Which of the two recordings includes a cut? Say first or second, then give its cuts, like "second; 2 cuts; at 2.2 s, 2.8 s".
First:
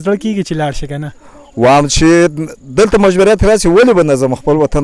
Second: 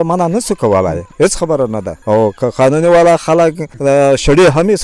second; 3 cuts; at 1.0 s, 1.9 s, 3.7 s